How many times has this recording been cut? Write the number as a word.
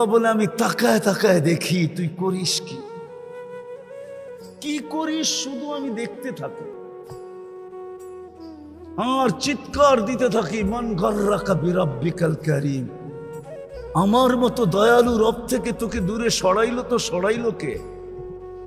two